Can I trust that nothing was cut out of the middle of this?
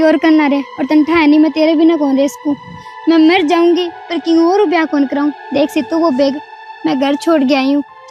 yes; 0 cuts

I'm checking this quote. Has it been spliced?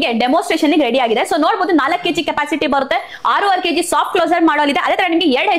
no; 0 cuts

